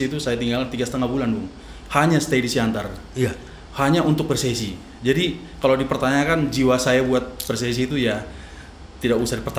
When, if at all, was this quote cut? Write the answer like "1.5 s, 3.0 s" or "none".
none